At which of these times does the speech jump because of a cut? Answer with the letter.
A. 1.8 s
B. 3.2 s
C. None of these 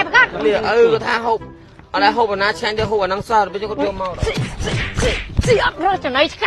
C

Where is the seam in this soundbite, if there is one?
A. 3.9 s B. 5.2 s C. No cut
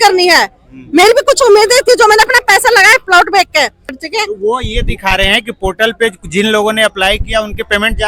A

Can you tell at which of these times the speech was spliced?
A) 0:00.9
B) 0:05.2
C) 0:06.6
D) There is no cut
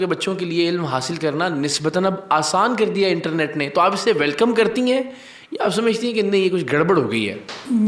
D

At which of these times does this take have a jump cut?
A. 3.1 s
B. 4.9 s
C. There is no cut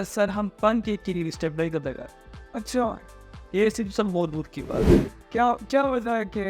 B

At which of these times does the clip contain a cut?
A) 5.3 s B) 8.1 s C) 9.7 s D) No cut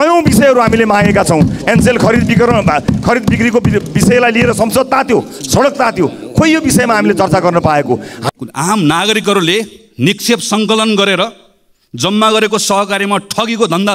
B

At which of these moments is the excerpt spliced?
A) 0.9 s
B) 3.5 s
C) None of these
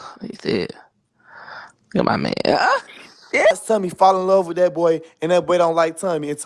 B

